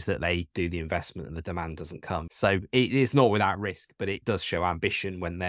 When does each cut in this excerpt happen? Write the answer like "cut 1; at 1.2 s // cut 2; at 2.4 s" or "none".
cut 1; at 2.3 s